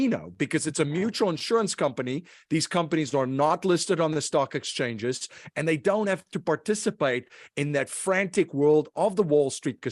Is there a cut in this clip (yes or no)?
no